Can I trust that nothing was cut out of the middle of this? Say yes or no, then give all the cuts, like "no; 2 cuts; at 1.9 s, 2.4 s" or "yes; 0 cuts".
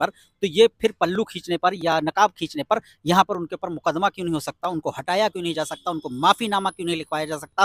yes; 0 cuts